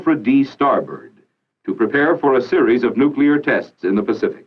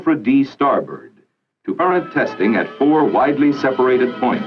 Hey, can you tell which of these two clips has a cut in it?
first; 1 cut; at 1.8 s

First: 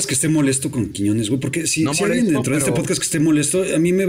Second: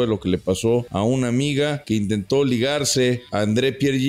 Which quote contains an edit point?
second; 3 cuts; at 0.9 s, 1.8 s, 3.2 s

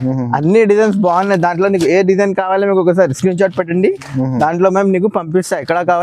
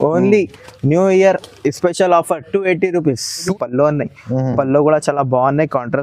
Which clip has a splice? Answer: second; 1 cut; at 3.5 s

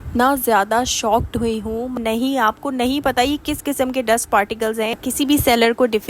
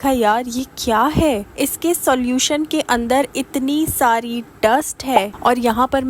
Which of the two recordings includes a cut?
first; 2 cuts; at 2.0 s, 4.9 s

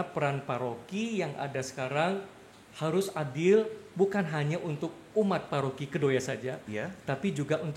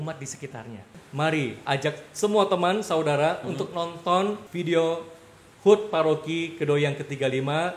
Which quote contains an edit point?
second; 2 cuts; at 0.9 s, 4.5 s

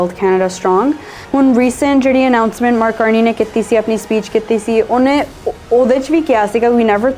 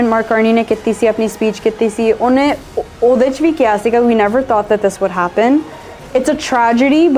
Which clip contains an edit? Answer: first; 1 cut; at 1.1 s

